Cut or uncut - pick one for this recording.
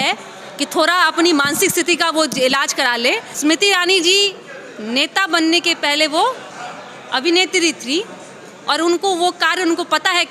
cut